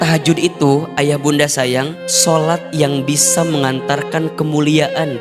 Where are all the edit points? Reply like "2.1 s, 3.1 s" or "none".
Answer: none